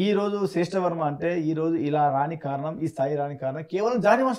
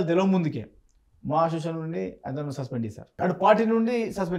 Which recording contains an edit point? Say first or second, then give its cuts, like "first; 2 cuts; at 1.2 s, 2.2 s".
second; 1 cut; at 3.1 s